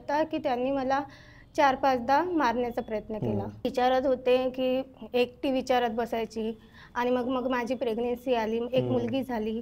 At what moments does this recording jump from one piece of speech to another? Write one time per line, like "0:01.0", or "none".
0:03.7